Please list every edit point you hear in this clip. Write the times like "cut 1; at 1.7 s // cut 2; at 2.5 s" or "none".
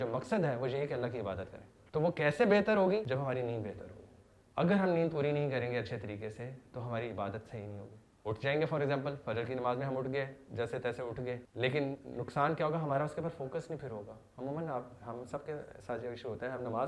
none

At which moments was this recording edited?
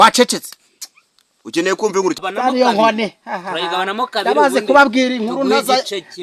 cut 1; at 2.1 s

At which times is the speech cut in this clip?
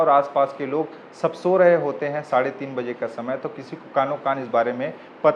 none

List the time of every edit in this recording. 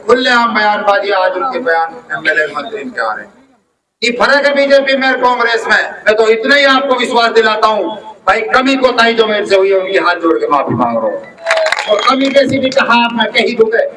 cut 1; at 5.9 s // cut 2; at 11.5 s

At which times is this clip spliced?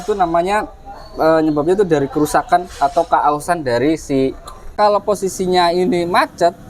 cut 1; at 4.7 s

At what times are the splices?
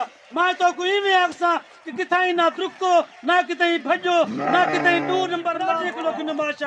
cut 1; at 5.7 s

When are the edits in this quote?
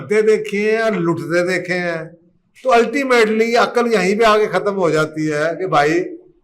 none

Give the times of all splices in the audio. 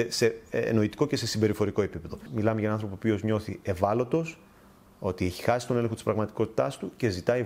cut 1; at 2.1 s

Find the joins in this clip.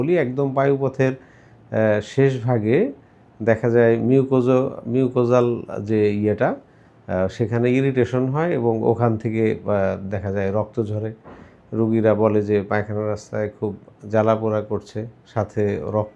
none

